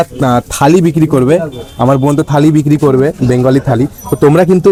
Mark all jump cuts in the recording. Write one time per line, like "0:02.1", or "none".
none